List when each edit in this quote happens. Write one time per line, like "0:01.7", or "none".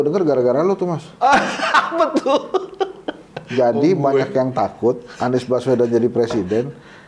none